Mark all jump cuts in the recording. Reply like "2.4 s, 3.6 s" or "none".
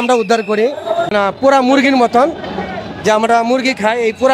1.1 s